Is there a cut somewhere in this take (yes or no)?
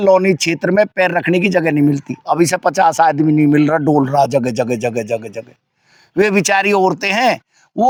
no